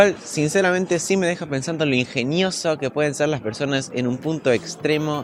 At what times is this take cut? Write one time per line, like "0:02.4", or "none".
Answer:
none

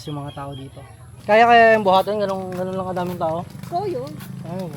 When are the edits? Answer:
0:01.2

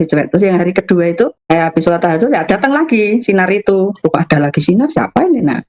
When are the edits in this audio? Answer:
none

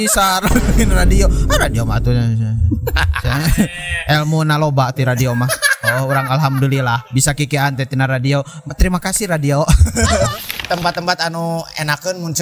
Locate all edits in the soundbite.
0:10.4

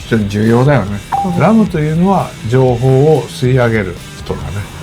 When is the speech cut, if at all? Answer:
0:01.0

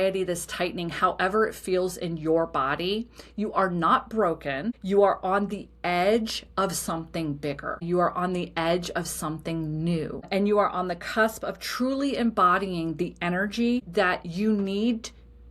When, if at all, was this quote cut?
0:04.8
0:07.8
0:10.3
0:13.9

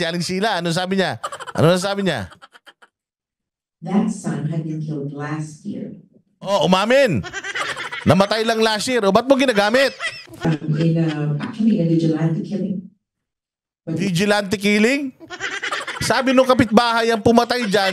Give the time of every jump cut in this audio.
0:10.4

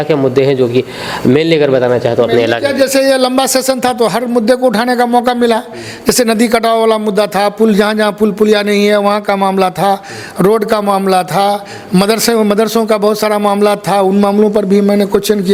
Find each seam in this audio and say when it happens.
none

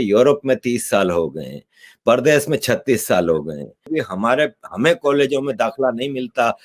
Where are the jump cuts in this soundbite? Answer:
0:03.9

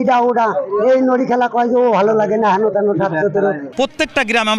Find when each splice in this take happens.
0:03.6

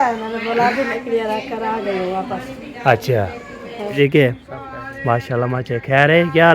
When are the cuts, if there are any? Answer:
0:04.1

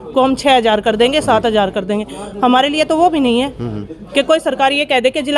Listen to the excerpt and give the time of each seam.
none

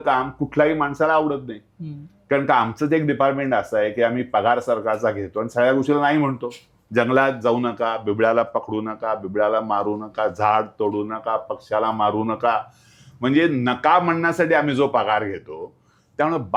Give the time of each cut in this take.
none

